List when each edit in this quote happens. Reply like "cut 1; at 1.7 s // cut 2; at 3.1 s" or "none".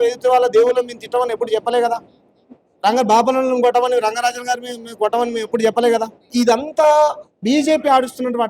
cut 1; at 6.3 s